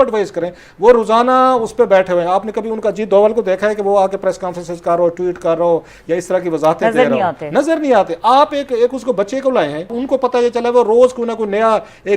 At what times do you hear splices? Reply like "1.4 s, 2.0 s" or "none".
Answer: 10.0 s